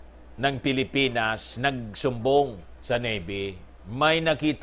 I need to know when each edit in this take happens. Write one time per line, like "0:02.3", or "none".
0:02.7